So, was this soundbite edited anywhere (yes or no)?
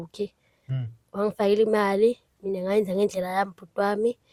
no